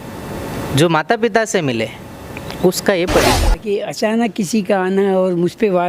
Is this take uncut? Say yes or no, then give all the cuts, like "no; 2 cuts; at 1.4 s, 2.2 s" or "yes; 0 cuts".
no; 1 cut; at 3.6 s